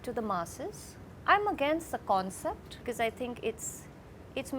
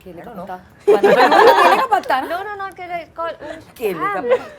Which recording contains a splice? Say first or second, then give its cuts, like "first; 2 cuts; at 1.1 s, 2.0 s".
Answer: first; 2 cuts; at 1.1 s, 2.8 s